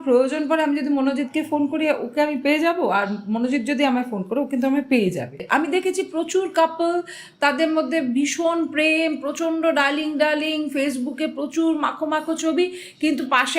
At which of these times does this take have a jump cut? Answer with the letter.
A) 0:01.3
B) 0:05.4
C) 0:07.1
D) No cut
B